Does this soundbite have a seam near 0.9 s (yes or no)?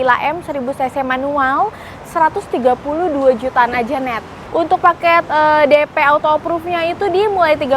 no